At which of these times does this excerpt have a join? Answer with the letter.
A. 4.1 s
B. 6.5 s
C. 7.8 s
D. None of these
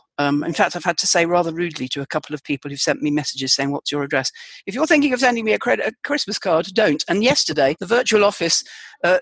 C